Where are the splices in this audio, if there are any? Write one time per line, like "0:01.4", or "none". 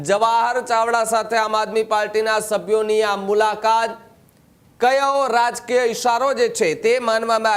none

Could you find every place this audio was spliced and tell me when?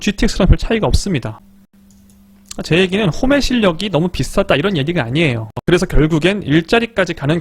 0:01.4
0:05.5

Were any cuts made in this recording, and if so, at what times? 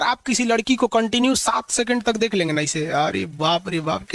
none

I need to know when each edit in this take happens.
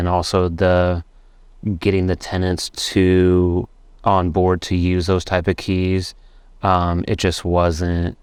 none

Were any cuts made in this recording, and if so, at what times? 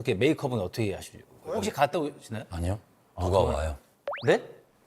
0:01.5

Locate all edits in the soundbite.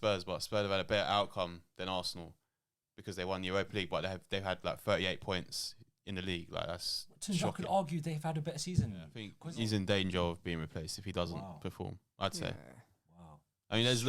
0:09.3

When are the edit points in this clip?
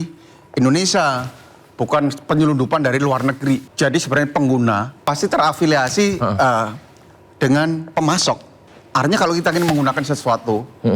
0:03.7
0:05.1
0:08.7

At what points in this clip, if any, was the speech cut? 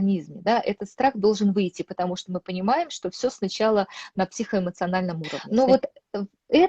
0:05.3

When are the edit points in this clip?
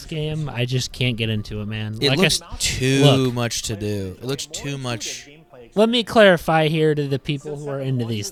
none

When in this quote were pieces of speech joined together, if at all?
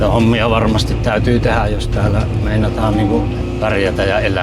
0:03.4

